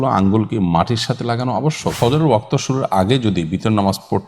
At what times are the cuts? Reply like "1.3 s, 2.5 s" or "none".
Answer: 2.0 s